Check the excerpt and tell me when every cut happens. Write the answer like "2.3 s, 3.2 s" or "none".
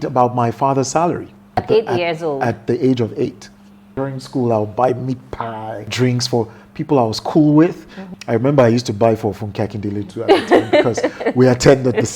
1.6 s, 3.9 s, 5.9 s, 8.0 s